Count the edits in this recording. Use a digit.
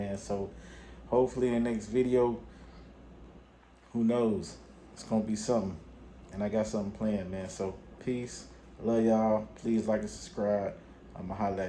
0